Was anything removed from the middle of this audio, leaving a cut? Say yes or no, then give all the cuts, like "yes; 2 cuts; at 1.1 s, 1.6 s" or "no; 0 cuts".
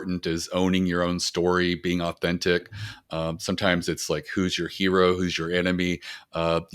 no; 0 cuts